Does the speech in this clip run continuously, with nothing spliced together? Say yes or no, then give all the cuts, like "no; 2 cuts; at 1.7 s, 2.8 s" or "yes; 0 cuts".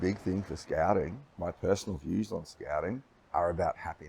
no; 2 cuts; at 1.2 s, 3.1 s